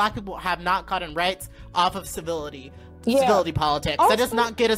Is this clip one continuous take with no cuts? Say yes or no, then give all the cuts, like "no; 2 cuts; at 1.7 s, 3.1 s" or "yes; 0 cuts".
yes; 0 cuts